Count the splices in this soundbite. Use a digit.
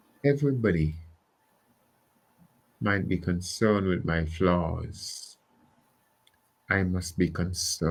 0